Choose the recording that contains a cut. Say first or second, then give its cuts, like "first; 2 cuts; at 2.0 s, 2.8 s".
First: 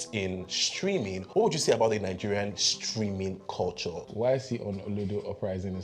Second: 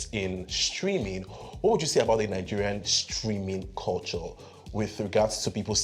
first; 2 cuts; at 1.2 s, 4.0 s